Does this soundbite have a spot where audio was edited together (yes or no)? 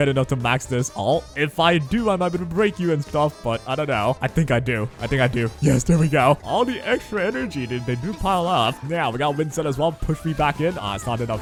no